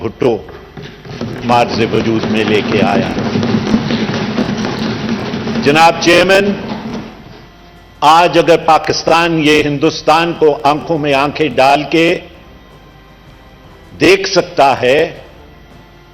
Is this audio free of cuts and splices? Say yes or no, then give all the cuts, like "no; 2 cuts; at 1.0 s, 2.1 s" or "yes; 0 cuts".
yes; 0 cuts